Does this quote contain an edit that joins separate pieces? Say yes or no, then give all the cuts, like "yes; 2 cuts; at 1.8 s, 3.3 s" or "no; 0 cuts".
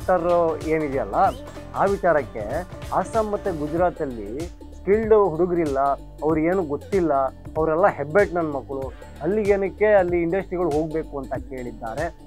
no; 0 cuts